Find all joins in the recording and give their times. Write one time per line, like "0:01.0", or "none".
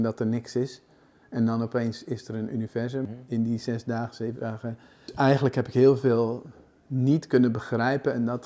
0:03.0
0:05.1